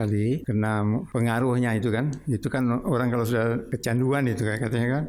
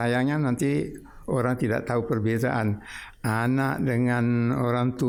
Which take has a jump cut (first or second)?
first